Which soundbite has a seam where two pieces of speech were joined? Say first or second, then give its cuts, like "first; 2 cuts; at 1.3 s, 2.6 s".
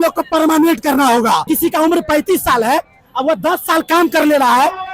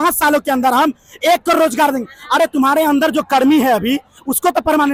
first; 1 cut; at 1.5 s